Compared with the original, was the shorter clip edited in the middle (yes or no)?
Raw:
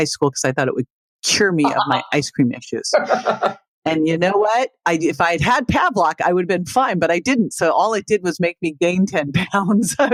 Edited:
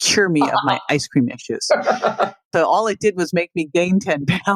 yes